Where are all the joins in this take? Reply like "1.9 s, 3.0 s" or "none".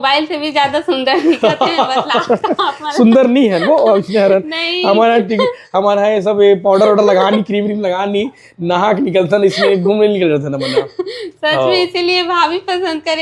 none